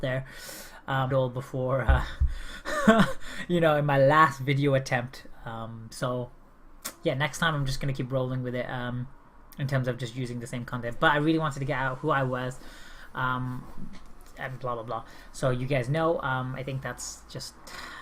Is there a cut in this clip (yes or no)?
no